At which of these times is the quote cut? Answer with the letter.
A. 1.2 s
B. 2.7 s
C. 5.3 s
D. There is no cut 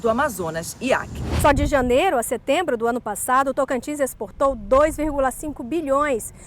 A